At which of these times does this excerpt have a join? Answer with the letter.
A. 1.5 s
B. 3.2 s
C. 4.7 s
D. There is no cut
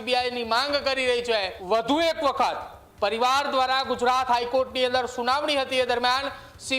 A